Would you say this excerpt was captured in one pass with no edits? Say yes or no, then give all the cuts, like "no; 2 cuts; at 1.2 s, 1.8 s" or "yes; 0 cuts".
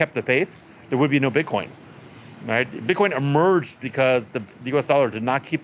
yes; 0 cuts